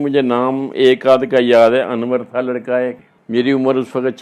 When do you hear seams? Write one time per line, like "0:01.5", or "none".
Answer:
0:03.1